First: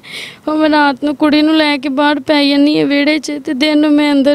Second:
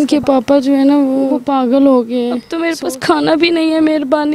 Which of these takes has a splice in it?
second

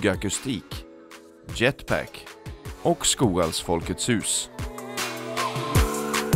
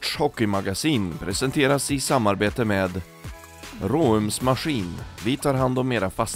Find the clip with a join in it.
first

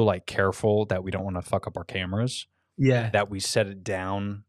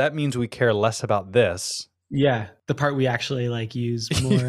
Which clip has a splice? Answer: second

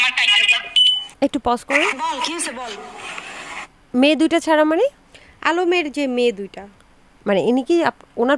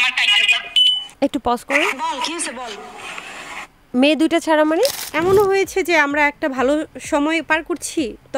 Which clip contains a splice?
second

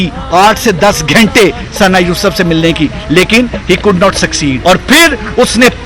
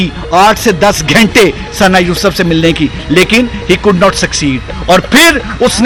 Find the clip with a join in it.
first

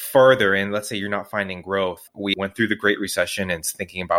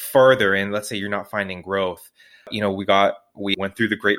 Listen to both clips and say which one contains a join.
first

